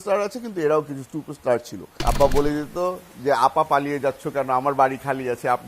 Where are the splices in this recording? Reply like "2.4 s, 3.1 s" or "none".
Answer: 1.8 s